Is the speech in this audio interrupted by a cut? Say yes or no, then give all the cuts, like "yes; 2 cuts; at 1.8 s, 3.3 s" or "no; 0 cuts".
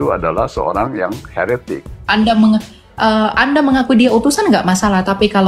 yes; 1 cut; at 2.1 s